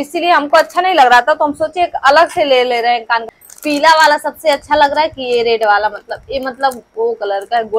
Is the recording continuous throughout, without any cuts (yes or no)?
no